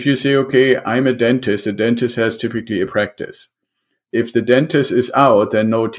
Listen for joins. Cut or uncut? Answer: uncut